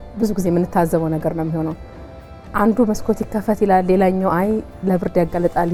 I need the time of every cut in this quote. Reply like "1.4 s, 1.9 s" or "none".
none